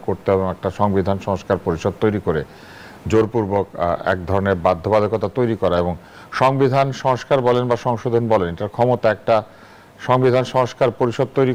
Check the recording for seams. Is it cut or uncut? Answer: uncut